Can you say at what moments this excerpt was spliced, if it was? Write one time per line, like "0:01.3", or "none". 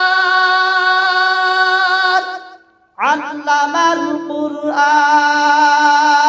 none